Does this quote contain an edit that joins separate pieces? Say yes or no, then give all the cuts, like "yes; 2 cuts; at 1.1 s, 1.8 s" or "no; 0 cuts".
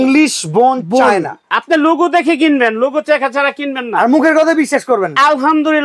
no; 0 cuts